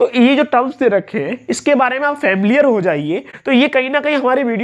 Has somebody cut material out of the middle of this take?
yes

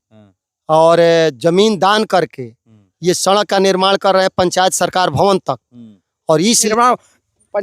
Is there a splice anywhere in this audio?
yes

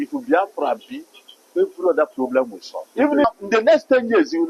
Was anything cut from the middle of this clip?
yes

